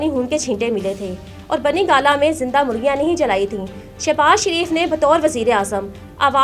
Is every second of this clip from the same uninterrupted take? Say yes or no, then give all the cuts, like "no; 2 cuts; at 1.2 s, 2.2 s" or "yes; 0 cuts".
yes; 0 cuts